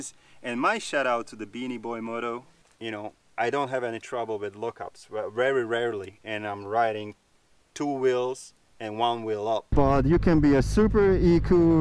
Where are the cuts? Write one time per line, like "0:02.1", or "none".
0:02.6
0:09.7